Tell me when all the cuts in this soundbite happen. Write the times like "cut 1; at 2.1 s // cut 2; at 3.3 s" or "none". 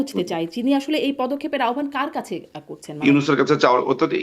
cut 1; at 3.0 s